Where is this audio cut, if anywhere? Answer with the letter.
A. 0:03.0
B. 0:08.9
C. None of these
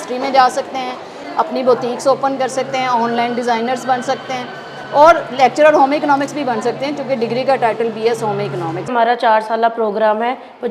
B